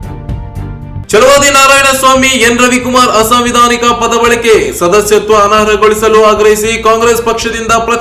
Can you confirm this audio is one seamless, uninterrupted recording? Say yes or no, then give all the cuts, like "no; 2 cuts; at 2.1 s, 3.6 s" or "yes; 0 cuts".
no; 1 cut; at 1.0 s